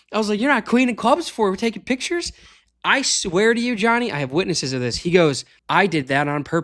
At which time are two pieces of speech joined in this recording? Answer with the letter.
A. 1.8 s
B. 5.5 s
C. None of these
B